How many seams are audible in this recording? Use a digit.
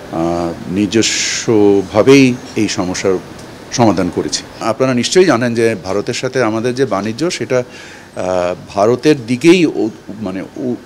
1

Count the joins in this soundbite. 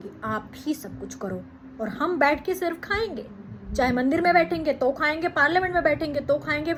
0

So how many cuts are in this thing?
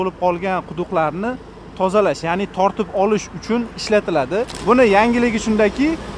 1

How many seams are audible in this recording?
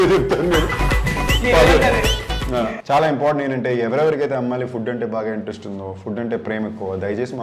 1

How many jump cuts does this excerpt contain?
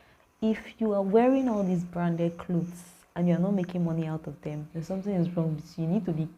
1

